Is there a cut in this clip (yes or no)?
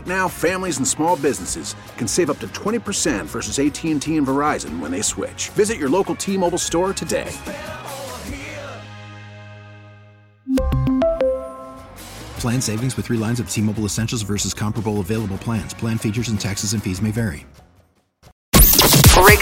yes